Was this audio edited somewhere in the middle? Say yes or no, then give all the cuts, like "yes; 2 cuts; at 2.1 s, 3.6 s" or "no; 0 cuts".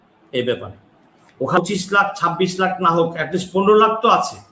yes; 1 cut; at 1.6 s